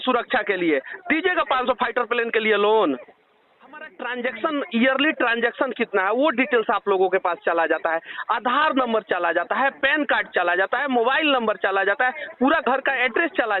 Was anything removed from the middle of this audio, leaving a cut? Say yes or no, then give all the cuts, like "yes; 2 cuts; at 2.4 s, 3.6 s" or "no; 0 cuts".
yes; 1 cut; at 3.9 s